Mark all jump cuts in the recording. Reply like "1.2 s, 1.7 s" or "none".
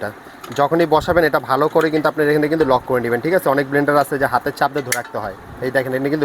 none

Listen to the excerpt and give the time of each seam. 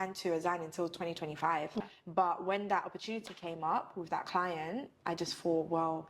2.0 s

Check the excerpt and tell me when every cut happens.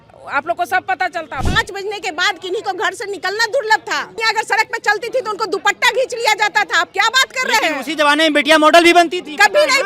1.4 s, 4.2 s

